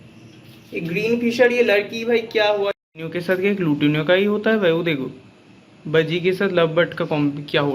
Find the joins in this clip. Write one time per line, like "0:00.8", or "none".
0:02.7